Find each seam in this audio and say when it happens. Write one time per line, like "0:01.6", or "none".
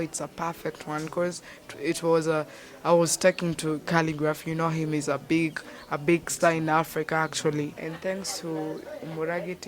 0:07.8

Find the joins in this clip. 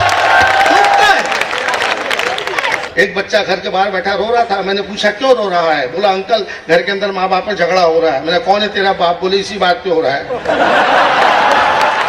0:02.8

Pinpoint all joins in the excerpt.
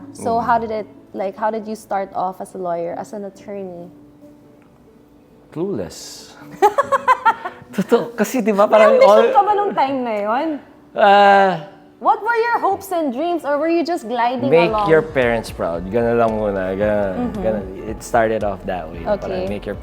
none

